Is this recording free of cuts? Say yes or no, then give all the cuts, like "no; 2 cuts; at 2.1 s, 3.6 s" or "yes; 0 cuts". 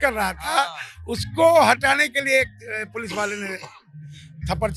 yes; 0 cuts